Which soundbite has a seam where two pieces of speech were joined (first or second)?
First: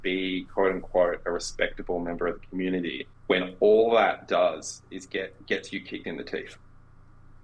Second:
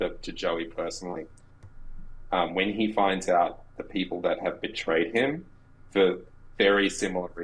first